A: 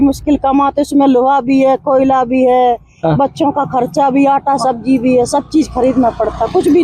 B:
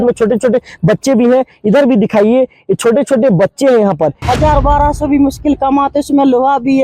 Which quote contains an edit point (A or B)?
B